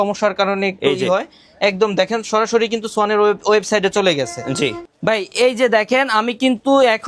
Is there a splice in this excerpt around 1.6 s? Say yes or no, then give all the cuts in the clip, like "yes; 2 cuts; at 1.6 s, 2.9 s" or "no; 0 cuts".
no; 1 cut; at 4.8 s